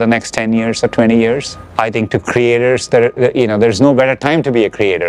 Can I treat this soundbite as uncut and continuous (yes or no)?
yes